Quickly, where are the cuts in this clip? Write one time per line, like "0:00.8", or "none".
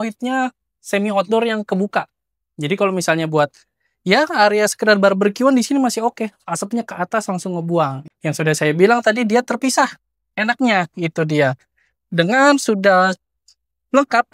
0:08.0